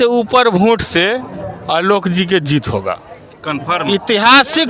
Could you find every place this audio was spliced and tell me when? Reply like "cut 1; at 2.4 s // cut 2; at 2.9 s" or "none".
none

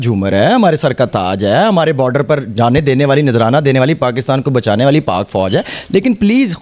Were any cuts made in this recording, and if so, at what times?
none

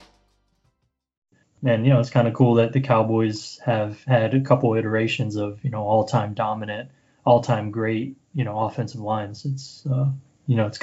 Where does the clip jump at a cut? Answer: cut 1; at 1.4 s

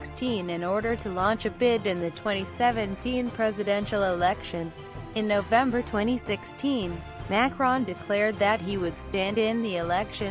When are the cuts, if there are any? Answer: cut 1; at 2.6 s

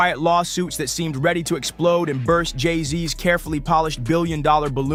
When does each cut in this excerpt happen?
none

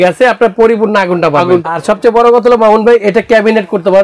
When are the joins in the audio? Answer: cut 1; at 1.7 s

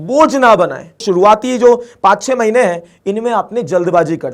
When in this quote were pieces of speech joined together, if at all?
cut 1; at 1.0 s

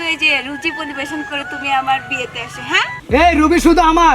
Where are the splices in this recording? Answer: cut 1; at 3.0 s

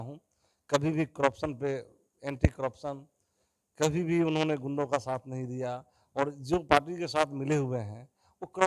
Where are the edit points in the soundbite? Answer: none

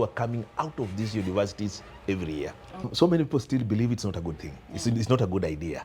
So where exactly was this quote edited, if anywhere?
cut 1; at 2.9 s

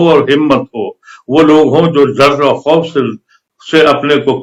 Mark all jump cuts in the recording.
none

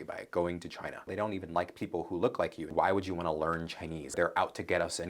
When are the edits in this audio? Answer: cut 1; at 1.1 s // cut 2; at 2.6 s // cut 3; at 4.1 s

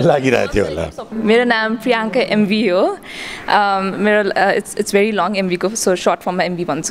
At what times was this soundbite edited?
cut 1; at 1.2 s

